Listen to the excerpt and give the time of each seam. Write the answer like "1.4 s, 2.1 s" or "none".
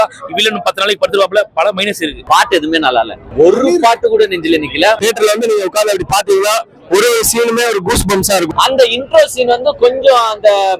2.1 s, 3.2 s, 5.0 s, 8.5 s